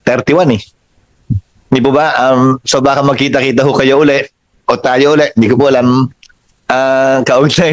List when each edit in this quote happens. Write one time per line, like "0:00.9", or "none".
none